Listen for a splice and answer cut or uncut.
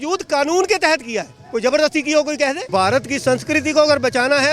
cut